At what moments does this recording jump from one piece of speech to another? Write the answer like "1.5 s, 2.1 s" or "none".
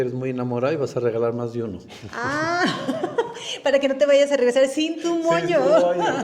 none